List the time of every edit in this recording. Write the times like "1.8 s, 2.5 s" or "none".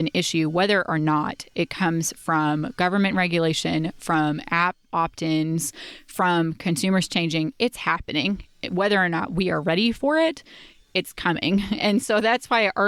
none